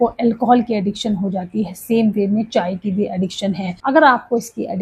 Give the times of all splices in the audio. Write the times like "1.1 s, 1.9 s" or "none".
3.7 s